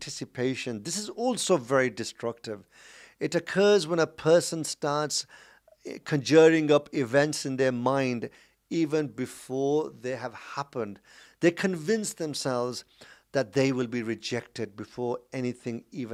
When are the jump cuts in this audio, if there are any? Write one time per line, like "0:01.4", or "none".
none